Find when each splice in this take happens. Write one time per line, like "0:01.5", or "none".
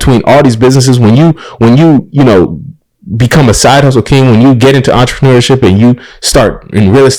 none

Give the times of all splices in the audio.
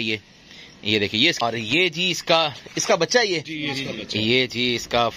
0:01.4

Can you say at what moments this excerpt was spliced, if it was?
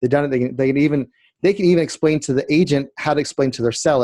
none

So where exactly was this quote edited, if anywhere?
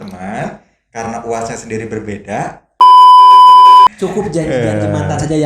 0:02.6
0:03.9

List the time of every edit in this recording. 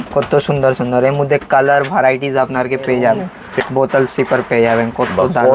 0:03.4

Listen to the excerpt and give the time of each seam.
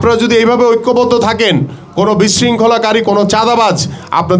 none

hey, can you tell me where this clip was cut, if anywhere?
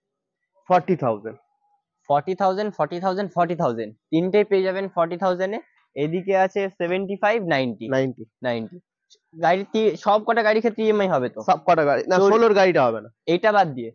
none

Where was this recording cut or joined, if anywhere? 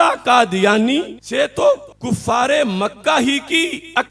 0:01.2
0:01.9

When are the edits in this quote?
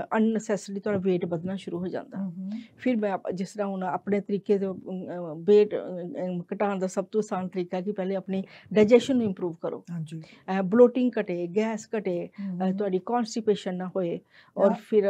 none

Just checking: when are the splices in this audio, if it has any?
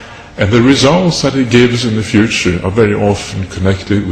0:01.8

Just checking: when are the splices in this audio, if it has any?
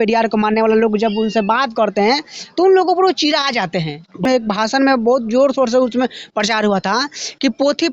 0:04.3

